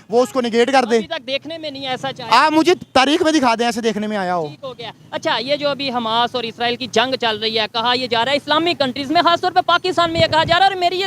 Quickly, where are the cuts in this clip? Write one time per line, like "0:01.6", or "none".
none